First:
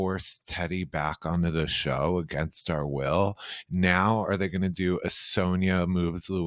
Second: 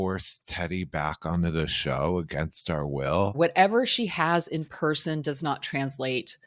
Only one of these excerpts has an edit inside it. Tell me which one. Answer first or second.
second